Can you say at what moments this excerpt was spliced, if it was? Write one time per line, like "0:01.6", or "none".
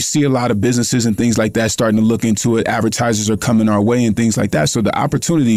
none

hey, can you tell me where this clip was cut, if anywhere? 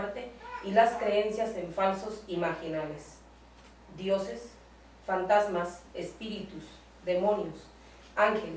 none

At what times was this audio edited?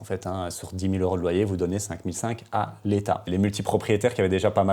0:03.3

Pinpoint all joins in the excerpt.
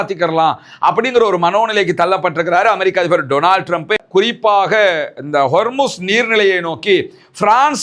0:04.0

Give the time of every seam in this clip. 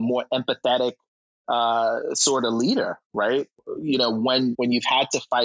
0:04.5

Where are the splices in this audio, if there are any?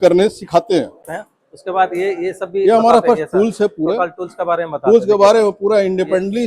0:01.0

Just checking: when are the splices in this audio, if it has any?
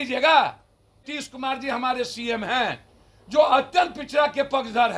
0:01.1

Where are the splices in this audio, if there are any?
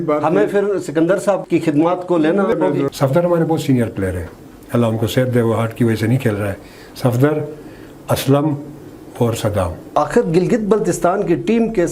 0:02.9
0:09.9

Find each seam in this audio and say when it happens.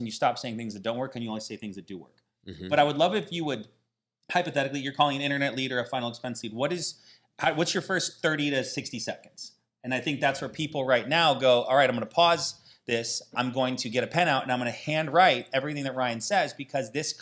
none

